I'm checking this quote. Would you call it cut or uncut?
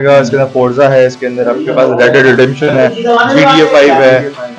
uncut